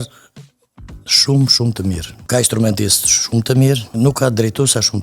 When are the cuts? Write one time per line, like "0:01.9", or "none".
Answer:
0:02.1
0:03.9